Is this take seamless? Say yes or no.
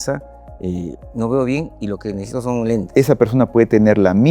no